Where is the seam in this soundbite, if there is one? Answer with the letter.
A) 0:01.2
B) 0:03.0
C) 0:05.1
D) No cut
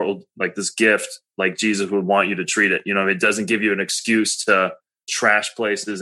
C